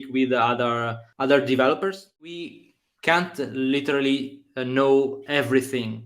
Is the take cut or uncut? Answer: cut